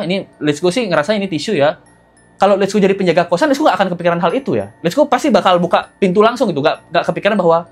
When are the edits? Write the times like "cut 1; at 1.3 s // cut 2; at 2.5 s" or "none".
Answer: cut 1; at 1.9 s

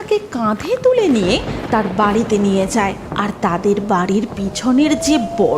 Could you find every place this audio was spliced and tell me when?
cut 1; at 3.1 s

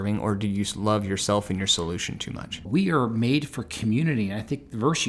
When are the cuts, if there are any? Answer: cut 1; at 2.6 s

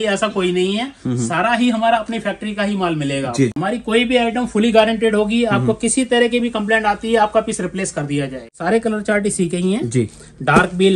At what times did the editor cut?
cut 1; at 3.5 s // cut 2; at 8.5 s

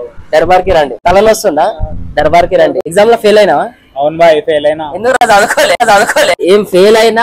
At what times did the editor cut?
cut 1; at 1.0 s // cut 2; at 2.8 s // cut 3; at 5.8 s

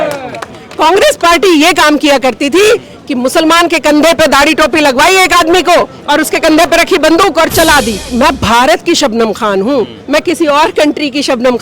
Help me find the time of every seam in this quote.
cut 1; at 8.0 s

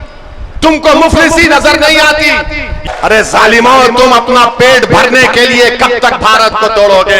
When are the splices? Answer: cut 1; at 2.8 s

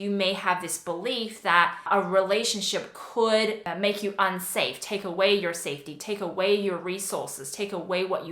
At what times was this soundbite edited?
cut 1; at 1.9 s

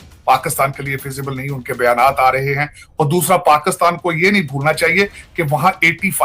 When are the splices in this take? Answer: none

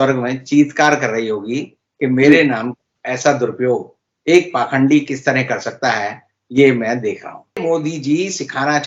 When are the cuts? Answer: cut 1; at 7.6 s

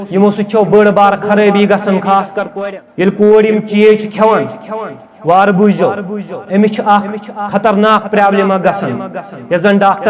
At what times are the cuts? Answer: cut 1; at 2.4 s

